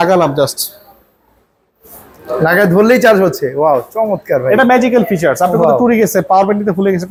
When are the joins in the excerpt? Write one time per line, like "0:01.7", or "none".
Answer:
none